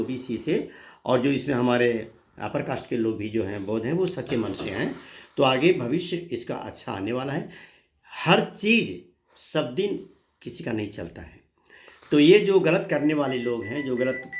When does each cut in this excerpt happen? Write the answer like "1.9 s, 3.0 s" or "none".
none